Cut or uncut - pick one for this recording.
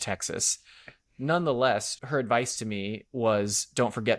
cut